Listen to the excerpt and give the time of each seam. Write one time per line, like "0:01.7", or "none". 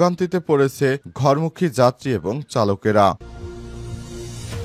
0:03.2